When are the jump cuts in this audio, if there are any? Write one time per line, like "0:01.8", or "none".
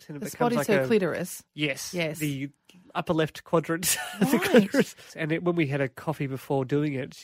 0:05.0